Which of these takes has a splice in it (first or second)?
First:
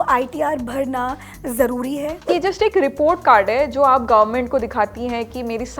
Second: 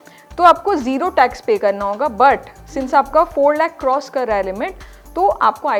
first